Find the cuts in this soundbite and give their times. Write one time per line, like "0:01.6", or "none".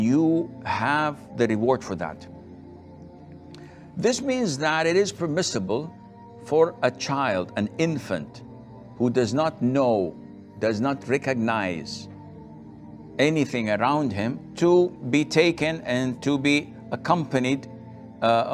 none